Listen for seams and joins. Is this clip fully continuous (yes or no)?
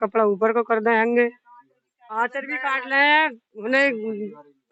yes